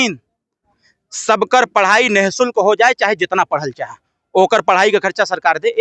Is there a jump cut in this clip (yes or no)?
no